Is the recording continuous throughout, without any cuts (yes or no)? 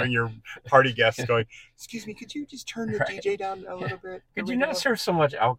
yes